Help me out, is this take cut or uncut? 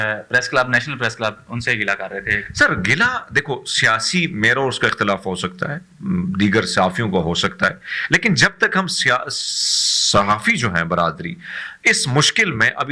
uncut